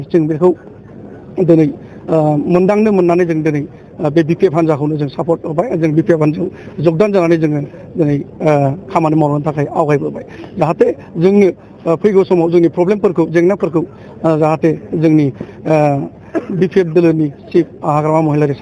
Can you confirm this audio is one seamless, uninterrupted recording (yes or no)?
yes